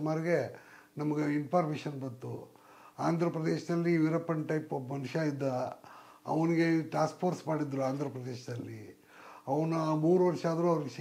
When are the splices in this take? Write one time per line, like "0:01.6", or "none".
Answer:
none